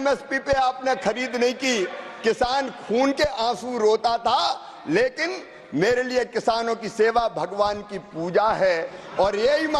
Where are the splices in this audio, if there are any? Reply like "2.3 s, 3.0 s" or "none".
none